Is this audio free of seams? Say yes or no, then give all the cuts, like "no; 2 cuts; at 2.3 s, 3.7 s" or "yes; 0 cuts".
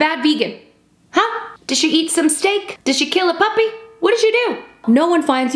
no; 2 cuts; at 2.7 s, 4.8 s